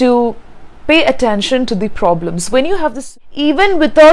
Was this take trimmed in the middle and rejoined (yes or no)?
yes